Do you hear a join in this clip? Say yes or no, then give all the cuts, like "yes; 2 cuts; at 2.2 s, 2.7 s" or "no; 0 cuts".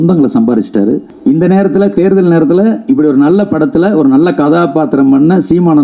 yes; 1 cut; at 1.1 s